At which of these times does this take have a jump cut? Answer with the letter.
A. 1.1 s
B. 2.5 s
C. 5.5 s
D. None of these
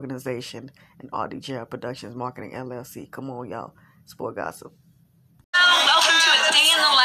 C